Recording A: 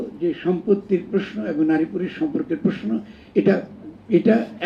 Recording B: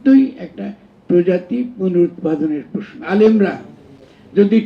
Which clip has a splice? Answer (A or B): B